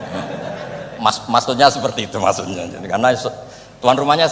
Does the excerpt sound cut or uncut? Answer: uncut